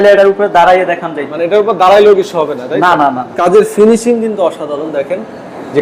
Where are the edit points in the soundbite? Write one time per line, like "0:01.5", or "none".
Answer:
0:03.4